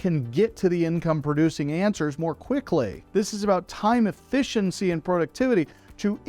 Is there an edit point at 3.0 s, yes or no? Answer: yes